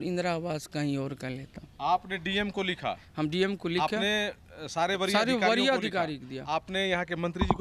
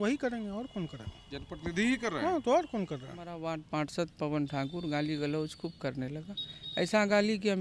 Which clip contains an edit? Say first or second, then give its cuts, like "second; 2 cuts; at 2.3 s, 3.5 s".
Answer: second; 1 cut; at 3.4 s